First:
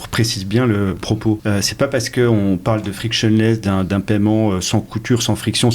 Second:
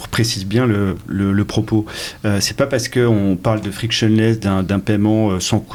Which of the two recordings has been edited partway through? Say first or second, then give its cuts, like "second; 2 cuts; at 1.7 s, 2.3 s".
first; 1 cut; at 1.1 s